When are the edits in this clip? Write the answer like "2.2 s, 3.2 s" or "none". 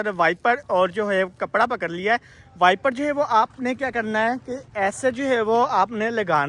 none